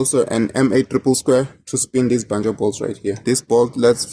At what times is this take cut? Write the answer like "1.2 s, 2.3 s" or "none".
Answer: 3.2 s